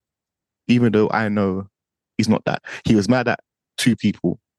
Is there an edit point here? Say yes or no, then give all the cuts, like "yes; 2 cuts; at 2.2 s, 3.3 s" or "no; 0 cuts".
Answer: yes; 1 cut; at 2.0 s